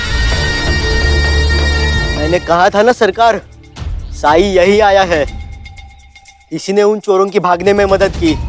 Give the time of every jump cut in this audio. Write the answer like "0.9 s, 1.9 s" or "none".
2.1 s